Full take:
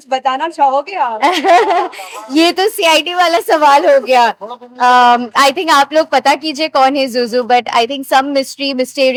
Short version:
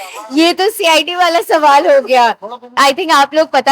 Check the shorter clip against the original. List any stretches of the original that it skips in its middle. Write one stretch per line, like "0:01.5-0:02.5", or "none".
0:04.7-0:05.3